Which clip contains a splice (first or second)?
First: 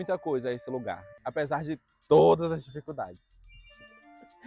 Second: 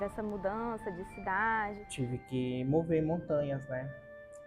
second